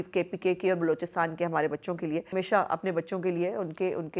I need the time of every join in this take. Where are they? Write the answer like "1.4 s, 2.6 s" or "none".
2.3 s